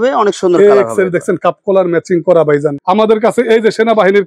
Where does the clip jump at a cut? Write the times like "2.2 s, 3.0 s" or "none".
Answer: 2.7 s